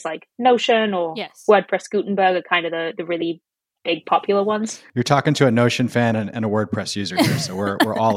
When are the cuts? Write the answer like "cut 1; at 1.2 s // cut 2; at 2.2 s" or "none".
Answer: cut 1; at 4.8 s